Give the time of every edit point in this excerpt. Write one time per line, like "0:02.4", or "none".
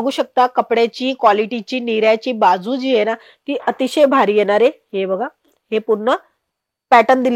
none